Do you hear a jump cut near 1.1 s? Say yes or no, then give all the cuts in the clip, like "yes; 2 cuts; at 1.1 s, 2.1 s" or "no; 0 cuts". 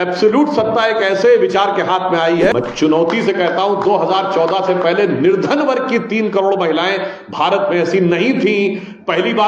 no; 1 cut; at 2.5 s